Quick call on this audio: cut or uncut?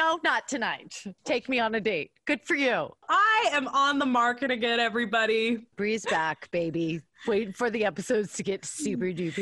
uncut